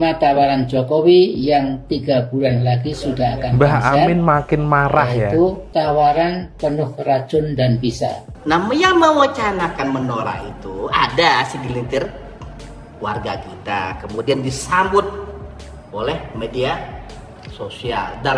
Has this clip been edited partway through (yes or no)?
yes